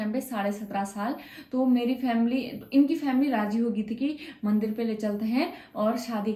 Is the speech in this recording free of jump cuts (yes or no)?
yes